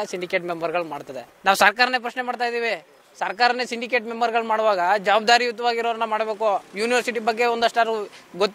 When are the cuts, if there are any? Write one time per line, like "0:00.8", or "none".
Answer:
0:01.3